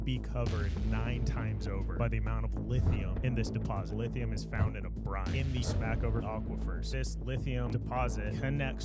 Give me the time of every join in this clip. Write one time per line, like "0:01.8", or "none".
none